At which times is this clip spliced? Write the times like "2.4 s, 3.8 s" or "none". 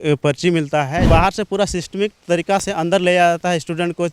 1.1 s